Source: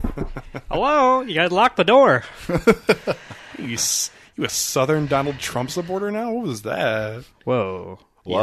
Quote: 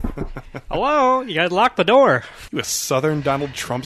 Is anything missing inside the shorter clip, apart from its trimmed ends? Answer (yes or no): yes